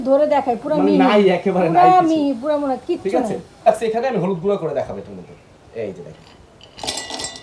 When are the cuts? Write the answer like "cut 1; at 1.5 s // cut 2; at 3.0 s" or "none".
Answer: cut 1; at 3.6 s